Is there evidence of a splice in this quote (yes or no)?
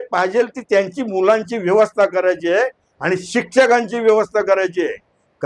no